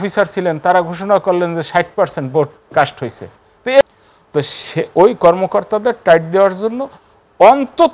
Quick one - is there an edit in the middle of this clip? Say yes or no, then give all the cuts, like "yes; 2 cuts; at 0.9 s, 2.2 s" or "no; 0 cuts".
yes; 1 cut; at 3.8 s